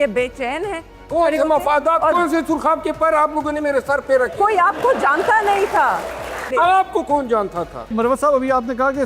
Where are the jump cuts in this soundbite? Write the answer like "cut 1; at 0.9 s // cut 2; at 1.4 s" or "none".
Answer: cut 1; at 1.1 s // cut 2; at 6.5 s // cut 3; at 7.9 s